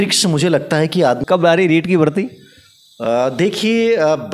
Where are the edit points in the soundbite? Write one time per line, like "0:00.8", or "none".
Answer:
0:01.2